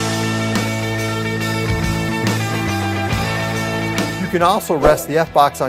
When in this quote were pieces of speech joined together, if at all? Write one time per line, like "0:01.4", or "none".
0:04.2